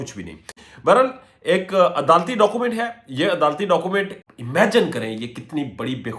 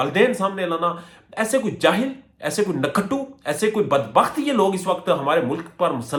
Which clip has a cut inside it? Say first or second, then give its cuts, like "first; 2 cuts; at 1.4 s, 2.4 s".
first; 1 cut; at 4.2 s